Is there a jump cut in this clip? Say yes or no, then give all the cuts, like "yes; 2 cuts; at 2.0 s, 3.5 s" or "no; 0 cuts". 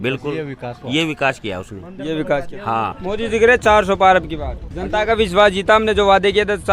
yes; 1 cut; at 2.9 s